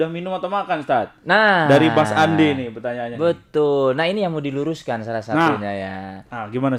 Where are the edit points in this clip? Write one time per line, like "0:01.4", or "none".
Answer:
none

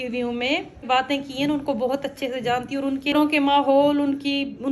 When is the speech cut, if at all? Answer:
0:00.8
0:03.1

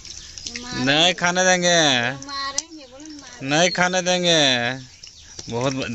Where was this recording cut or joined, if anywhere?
none

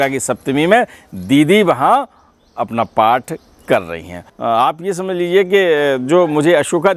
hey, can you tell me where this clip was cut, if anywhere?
0:04.2

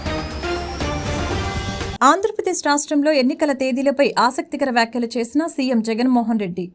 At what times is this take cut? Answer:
0:01.9

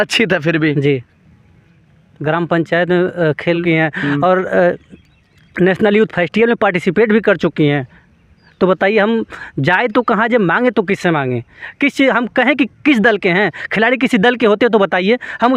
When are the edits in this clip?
0:03.6

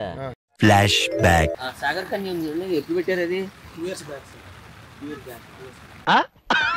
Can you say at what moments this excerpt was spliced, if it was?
none

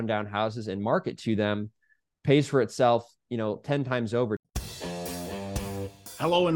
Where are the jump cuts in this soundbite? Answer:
0:04.4

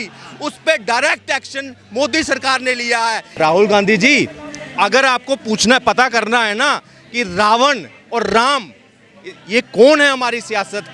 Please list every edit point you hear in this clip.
none

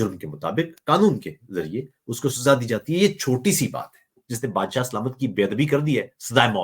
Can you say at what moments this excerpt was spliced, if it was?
0:04.2

